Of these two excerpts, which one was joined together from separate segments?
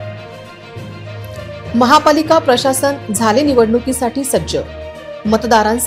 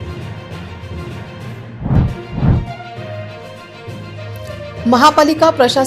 second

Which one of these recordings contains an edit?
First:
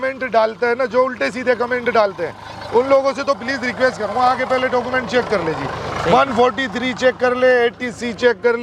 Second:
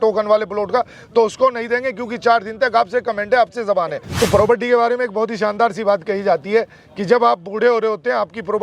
second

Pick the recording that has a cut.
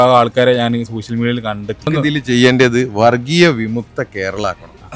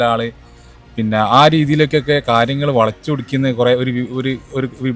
first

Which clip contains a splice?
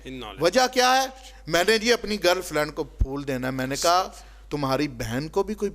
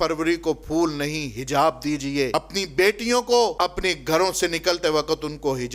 second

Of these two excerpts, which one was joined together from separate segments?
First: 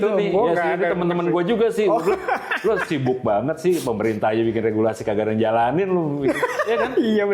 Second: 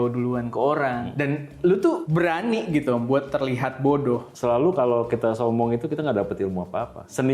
second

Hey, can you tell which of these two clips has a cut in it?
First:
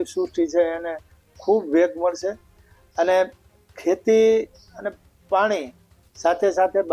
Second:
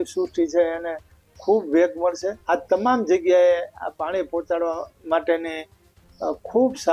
second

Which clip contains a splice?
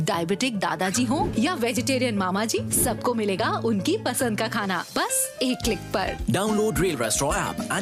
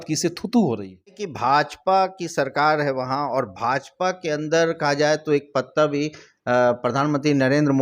second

